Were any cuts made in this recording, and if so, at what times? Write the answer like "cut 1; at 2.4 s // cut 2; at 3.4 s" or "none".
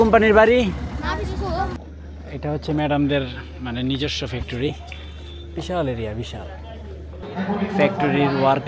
cut 1; at 1.8 s // cut 2; at 7.2 s